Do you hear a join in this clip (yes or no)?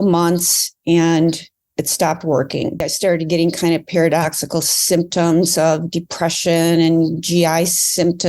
yes